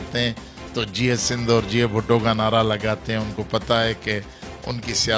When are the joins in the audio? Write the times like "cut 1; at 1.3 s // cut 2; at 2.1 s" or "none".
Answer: none